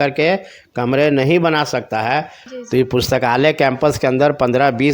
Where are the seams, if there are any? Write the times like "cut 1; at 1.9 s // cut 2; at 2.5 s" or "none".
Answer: cut 1; at 2.4 s